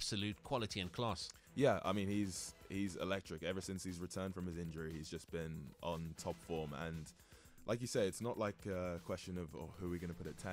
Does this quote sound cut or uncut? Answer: uncut